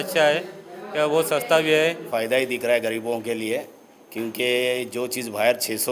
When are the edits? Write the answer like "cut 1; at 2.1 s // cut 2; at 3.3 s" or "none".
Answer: cut 1; at 2.1 s